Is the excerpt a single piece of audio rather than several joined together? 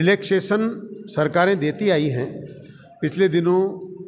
yes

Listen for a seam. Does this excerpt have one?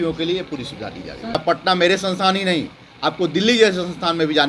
yes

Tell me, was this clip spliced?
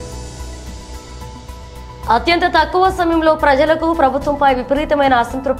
yes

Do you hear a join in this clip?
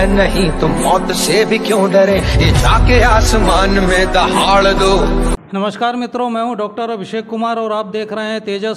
no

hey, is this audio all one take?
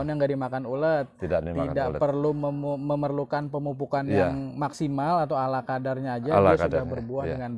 yes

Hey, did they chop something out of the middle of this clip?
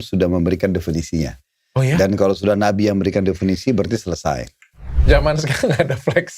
yes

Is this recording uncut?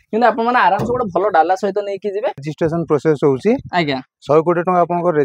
no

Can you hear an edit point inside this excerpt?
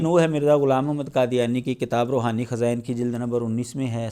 no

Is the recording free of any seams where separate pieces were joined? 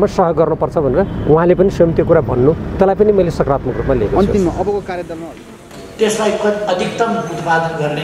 no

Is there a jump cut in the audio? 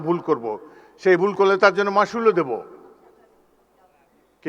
no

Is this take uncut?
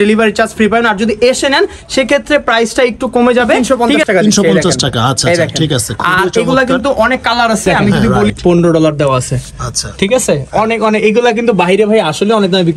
no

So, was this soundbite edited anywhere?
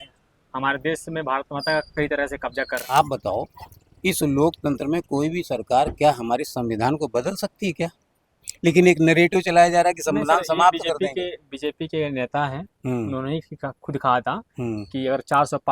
yes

